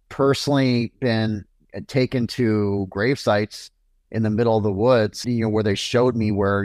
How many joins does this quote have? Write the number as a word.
one